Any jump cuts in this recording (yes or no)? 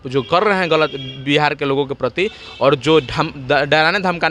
no